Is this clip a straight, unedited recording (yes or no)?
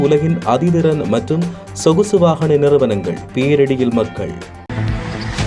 no